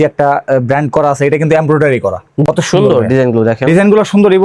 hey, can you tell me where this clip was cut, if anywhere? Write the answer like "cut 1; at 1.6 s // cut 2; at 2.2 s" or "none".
cut 1; at 2.4 s